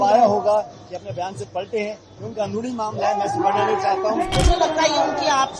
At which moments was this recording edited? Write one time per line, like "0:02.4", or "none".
0:04.3